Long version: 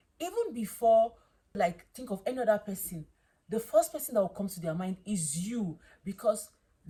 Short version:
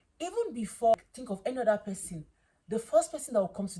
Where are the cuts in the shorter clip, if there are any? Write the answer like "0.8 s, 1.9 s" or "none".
0.9 s